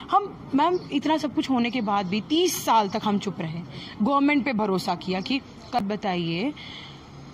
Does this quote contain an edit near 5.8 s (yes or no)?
yes